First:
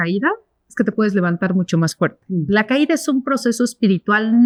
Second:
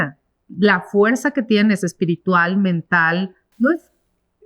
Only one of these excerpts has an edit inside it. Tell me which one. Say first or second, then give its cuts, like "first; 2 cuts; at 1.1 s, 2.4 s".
second; 1 cut; at 3.4 s